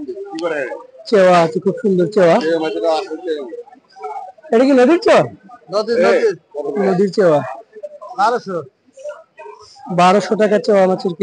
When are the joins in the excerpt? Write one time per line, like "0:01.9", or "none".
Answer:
none